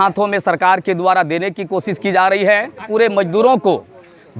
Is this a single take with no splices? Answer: no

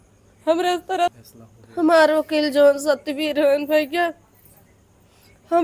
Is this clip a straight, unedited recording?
no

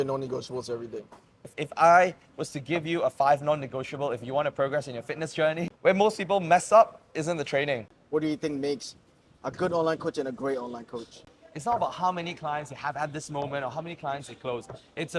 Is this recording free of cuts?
no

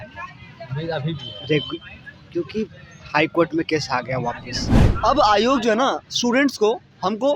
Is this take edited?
yes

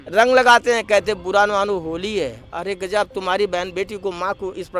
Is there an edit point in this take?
no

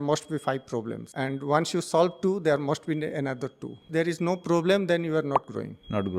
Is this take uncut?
no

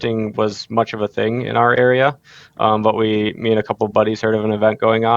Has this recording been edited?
no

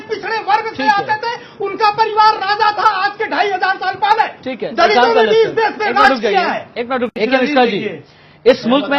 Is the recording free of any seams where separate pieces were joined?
no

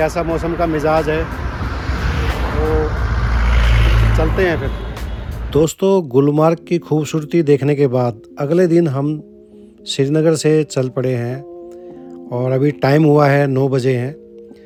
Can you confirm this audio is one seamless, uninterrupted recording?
yes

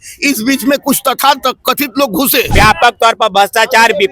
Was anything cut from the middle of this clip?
yes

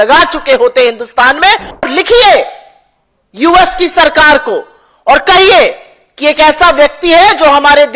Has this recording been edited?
yes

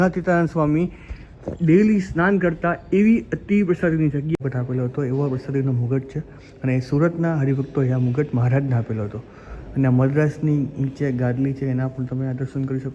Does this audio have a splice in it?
yes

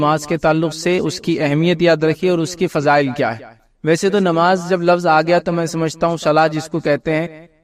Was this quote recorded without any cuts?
yes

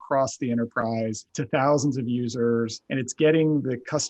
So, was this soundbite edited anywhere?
yes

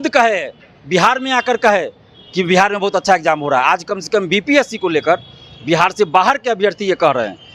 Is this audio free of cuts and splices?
yes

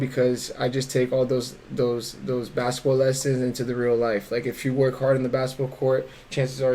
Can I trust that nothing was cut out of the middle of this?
yes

